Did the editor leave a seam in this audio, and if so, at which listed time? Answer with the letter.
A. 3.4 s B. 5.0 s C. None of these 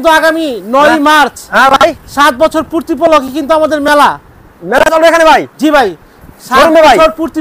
C